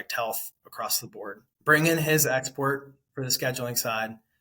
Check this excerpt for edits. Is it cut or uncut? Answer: cut